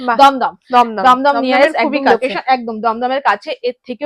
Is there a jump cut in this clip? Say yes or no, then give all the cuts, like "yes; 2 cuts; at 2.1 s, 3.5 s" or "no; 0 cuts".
no; 0 cuts